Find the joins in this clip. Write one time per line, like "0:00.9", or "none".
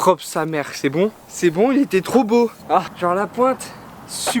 0:02.9